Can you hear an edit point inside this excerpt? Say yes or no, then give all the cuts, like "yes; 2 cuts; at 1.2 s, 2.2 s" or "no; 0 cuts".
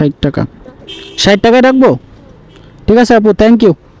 no; 0 cuts